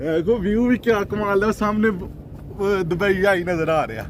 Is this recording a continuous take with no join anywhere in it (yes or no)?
yes